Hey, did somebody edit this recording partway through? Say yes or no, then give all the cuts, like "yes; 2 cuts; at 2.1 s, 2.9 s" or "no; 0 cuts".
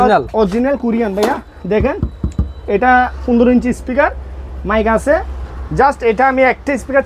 no; 0 cuts